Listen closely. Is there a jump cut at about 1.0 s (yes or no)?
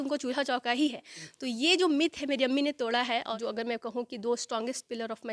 no